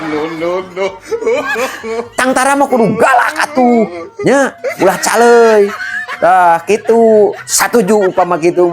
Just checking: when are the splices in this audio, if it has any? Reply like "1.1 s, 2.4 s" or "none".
2.1 s